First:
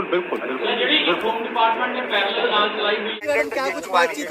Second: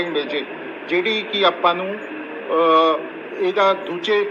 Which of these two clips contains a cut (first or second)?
first